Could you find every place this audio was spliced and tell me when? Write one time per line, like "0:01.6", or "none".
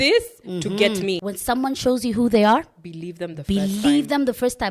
0:01.3